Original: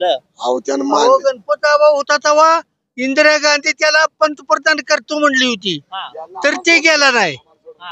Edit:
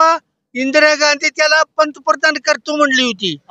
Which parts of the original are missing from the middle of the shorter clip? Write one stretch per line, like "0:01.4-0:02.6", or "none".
none